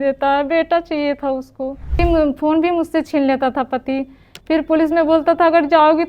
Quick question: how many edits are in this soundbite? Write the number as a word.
one